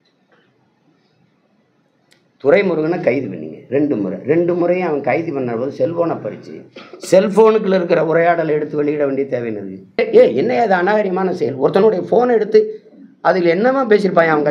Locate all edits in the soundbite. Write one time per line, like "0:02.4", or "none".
0:10.0

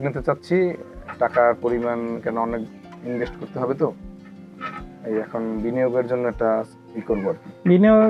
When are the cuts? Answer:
none

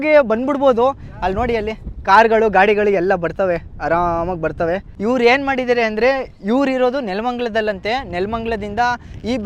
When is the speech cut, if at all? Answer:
0:04.9

